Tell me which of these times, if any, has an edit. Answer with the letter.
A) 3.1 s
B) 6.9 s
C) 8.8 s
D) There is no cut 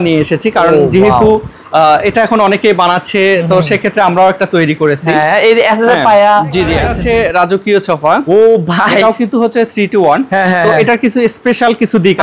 B